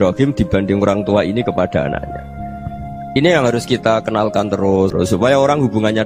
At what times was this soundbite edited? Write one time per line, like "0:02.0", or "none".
0:04.9